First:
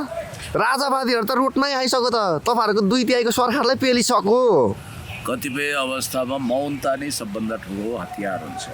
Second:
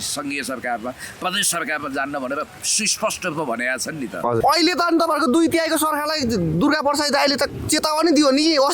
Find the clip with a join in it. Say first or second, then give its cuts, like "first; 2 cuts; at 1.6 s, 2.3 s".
second; 1 cut; at 4.4 s